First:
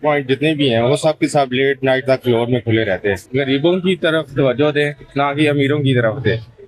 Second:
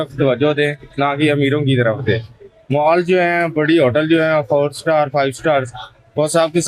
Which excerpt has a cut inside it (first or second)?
first